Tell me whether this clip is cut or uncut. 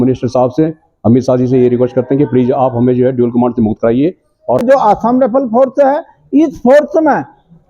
cut